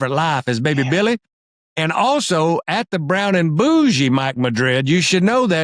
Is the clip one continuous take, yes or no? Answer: yes